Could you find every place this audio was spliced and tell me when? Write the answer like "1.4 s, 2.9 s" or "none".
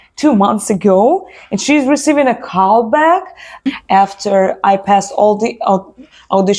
3.7 s